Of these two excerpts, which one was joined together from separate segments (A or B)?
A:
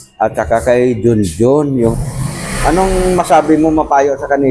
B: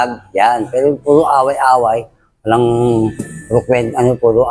A